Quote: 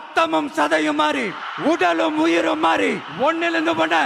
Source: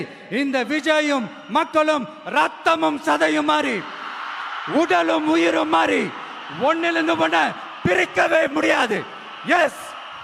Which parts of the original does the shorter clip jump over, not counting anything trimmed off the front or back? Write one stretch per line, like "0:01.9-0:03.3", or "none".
0:03.9-0:04.5
0:06.1-0:06.5